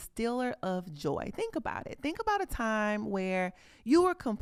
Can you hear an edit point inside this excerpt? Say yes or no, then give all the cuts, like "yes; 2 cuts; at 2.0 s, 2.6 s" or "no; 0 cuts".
no; 0 cuts